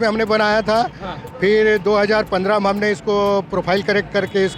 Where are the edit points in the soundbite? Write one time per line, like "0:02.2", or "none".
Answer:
none